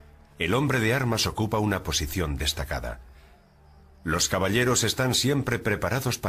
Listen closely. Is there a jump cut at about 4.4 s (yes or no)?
no